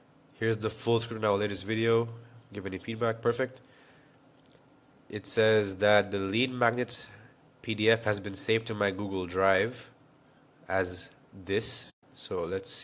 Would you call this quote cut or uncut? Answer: uncut